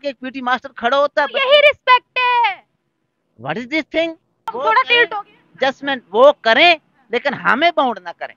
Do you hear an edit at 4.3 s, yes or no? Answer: yes